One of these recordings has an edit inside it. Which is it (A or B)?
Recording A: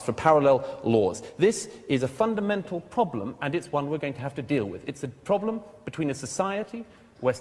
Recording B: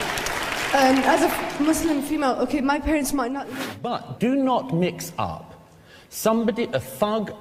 B